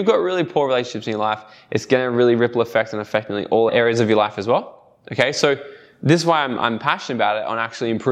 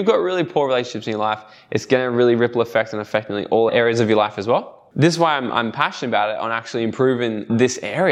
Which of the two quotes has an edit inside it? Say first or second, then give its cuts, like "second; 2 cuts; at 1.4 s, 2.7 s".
second; 1 cut; at 4.8 s